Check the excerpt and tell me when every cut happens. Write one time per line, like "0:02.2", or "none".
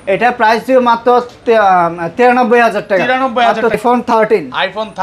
0:03.8